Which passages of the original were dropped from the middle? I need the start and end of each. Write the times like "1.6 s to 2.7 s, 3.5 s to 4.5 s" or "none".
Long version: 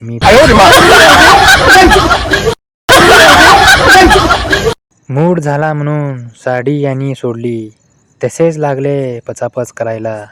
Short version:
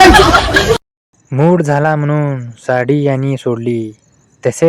2.7 s to 4.7 s